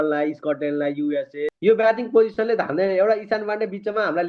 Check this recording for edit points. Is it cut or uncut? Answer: cut